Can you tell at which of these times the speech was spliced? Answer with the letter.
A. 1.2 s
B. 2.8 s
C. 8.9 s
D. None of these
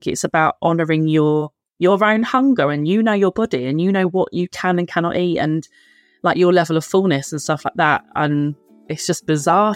C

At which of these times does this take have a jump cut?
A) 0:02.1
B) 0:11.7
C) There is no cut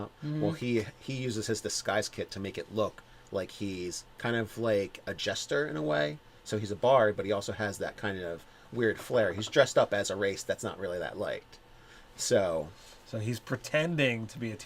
A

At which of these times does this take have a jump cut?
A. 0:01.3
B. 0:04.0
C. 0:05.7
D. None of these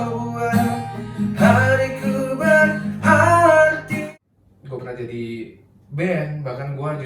B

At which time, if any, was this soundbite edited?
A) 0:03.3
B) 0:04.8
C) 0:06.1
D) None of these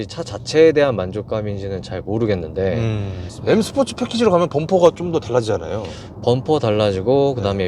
A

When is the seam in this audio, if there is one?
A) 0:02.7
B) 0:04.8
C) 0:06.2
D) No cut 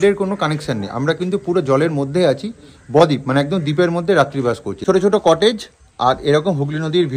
B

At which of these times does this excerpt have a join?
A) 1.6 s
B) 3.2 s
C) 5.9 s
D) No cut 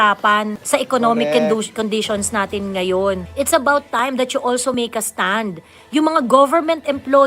B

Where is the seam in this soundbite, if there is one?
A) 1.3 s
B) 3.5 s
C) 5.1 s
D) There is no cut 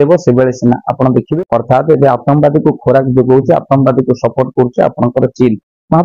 A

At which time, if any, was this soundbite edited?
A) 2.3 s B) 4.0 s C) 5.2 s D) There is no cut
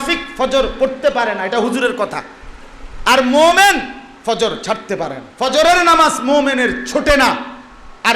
C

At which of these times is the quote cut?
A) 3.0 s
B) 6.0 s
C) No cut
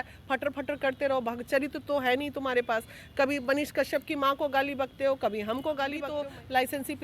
B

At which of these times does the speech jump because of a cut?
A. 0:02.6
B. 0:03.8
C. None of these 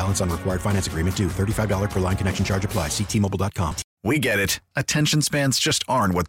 B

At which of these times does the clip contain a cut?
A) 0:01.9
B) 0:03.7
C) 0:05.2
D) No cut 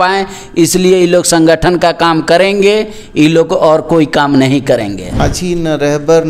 C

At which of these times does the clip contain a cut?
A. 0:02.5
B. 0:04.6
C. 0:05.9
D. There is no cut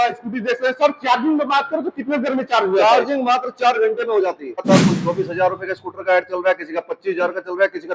B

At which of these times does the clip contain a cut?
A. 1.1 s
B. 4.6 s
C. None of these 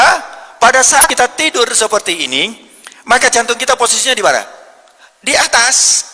A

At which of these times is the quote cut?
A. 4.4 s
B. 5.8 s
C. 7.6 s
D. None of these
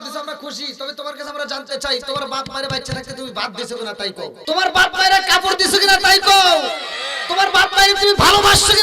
A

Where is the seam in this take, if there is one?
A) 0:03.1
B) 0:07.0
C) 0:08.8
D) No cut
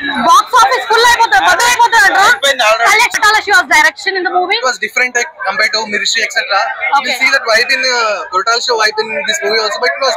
A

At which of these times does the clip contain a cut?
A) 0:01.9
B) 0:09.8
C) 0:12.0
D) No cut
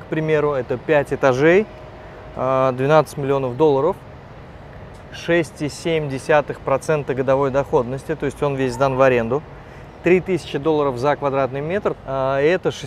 C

